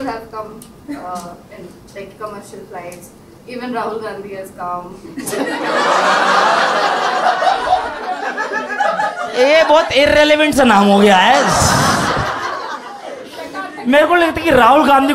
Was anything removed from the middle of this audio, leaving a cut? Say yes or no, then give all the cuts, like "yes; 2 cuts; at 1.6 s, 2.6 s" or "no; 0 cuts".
no; 0 cuts